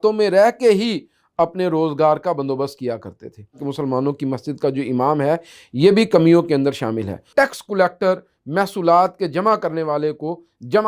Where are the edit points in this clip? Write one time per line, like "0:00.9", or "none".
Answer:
0:03.7
0:07.3